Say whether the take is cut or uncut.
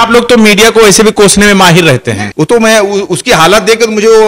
cut